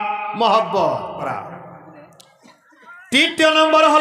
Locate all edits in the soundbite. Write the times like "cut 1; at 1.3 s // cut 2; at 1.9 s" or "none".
cut 1; at 1.2 s